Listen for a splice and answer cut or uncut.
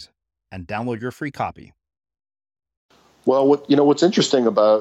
cut